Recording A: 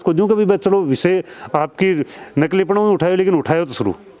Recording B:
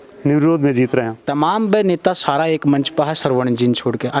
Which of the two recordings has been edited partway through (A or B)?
B